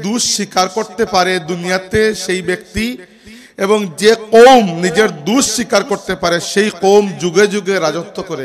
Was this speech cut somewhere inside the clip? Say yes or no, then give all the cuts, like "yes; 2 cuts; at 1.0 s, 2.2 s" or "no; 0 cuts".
no; 0 cuts